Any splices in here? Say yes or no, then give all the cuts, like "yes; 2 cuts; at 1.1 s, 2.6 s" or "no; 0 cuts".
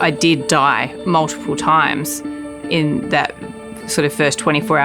yes; 1 cut; at 0.9 s